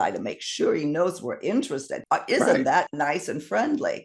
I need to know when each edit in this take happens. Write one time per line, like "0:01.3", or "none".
0:02.0